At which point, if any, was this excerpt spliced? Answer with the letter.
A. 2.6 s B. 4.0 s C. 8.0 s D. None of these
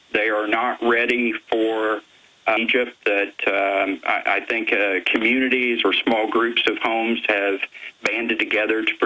D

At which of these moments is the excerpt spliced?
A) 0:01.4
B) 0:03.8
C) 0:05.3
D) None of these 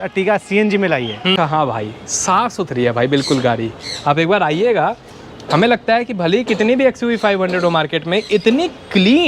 A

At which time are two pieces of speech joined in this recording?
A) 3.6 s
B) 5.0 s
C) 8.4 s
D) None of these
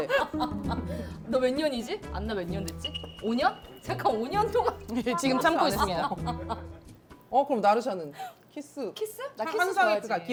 D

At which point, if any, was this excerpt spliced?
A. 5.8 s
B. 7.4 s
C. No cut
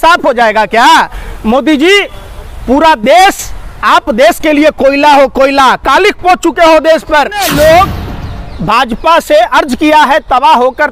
B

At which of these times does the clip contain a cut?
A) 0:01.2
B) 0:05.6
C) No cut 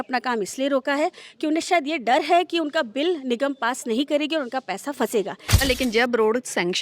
B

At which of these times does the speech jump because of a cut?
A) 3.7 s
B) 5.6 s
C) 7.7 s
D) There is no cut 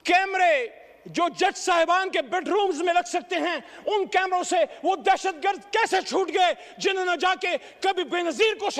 D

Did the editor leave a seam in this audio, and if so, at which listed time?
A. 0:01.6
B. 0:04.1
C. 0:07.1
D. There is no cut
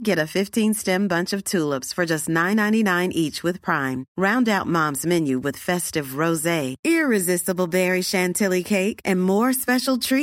D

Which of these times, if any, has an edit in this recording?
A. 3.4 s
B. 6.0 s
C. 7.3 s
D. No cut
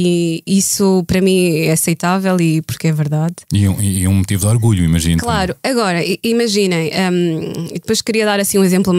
D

